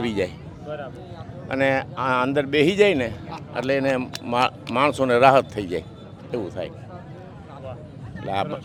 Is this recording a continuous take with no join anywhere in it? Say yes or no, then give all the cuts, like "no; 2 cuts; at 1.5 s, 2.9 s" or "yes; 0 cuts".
yes; 0 cuts